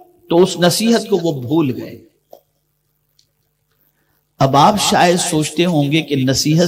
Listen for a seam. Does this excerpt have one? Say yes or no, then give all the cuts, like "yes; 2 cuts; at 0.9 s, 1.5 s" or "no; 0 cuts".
no; 0 cuts